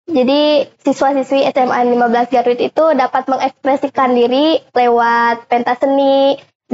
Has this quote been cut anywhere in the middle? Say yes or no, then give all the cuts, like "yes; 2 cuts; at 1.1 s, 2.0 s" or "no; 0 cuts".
no; 0 cuts